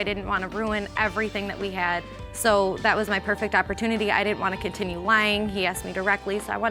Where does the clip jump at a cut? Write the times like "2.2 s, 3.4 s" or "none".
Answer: none